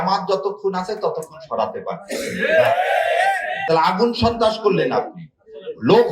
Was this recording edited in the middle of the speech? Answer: yes; 1 cut; at 3.6 s

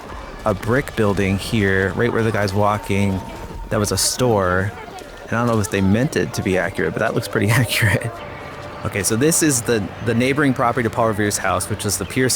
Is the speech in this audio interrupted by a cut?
yes; 1 cut; at 8.8 s

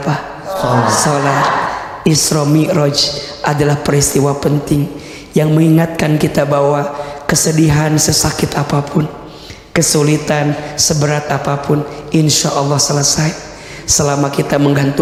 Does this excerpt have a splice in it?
no; 0 cuts

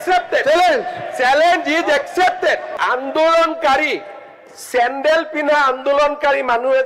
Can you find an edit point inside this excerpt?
yes; 1 cut; at 2.7 s

